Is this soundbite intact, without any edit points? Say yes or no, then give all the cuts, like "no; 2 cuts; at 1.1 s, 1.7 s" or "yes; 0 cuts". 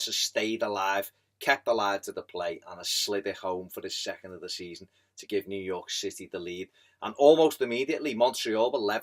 no; 1 cut; at 6.5 s